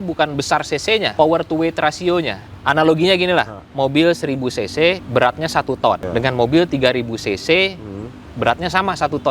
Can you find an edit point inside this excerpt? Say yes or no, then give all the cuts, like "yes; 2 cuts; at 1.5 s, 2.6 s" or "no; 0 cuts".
yes; 5 cuts; at 1.1 s, 2.4 s, 3.6 s, 5.0 s, 6.0 s